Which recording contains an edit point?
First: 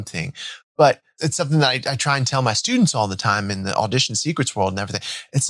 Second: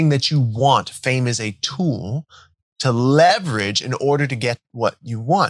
first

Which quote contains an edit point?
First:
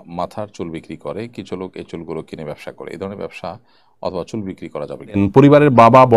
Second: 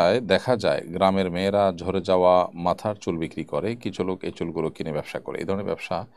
first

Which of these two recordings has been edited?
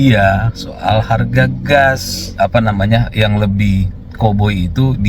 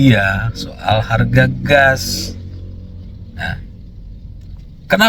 first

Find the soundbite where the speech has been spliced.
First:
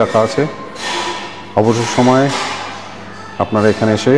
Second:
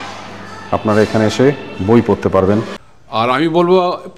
second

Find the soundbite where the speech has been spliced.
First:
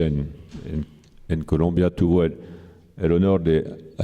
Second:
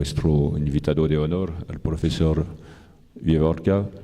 first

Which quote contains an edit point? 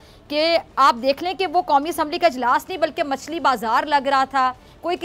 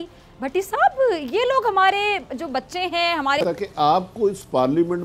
second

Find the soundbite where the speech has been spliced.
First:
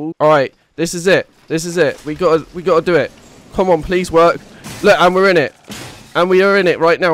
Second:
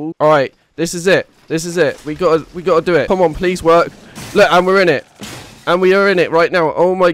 second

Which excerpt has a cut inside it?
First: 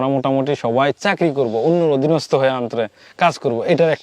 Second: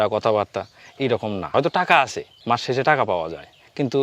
second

